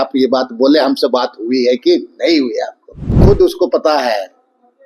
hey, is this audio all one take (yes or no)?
no